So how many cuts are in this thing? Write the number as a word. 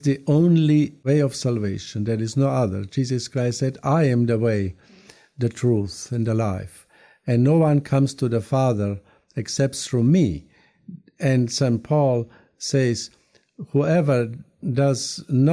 zero